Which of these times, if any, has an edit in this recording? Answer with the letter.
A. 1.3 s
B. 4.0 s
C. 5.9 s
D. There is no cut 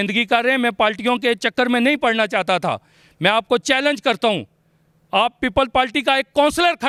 D